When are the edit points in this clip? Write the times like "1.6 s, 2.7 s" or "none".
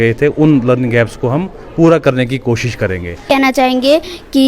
3.4 s